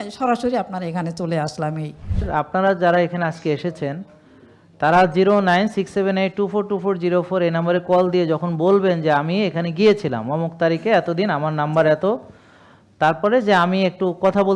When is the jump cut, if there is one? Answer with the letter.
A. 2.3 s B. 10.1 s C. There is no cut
A